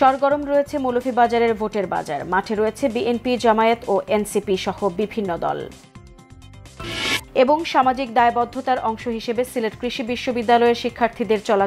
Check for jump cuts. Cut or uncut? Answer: uncut